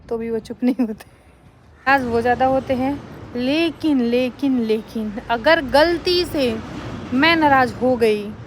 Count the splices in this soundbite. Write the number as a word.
one